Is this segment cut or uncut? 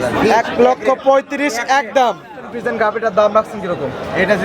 cut